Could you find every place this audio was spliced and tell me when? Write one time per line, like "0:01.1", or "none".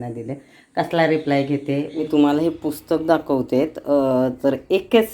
0:01.9